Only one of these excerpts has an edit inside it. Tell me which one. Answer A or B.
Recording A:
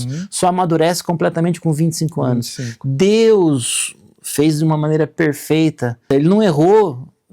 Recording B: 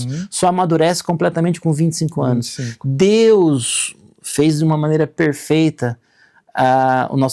A